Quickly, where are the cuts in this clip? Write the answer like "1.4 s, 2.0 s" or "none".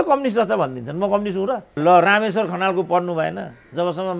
1.7 s